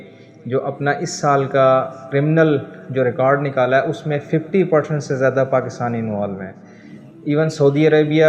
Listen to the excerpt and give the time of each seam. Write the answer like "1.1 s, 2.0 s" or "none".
2.0 s